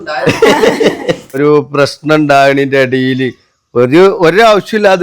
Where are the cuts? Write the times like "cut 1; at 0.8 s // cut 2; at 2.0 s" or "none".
cut 1; at 1.4 s